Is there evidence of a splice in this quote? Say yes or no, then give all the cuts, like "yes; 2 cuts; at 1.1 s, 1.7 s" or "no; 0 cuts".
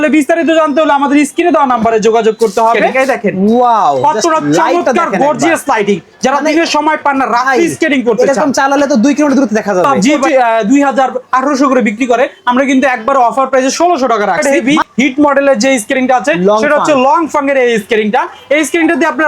yes; 3 cuts; at 2.9 s, 10.2 s, 14.4 s